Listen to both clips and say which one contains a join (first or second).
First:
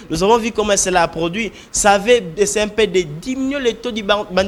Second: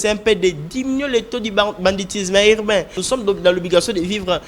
second